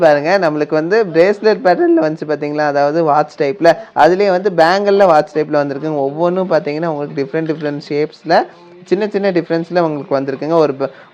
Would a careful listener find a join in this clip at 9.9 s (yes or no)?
no